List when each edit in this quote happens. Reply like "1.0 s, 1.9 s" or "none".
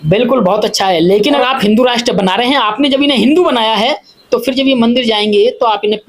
1.4 s